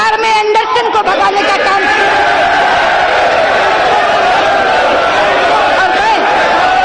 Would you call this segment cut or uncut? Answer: uncut